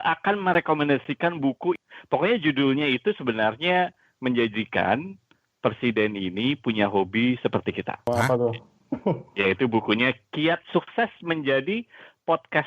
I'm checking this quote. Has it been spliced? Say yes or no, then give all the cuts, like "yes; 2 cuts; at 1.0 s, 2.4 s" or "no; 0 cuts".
no; 0 cuts